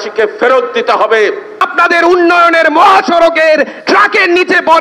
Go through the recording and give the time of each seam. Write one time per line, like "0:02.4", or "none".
0:01.7